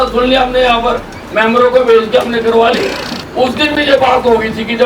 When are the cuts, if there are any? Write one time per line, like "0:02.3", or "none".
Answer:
0:03.1